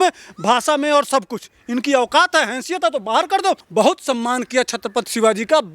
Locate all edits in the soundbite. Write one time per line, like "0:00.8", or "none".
0:03.6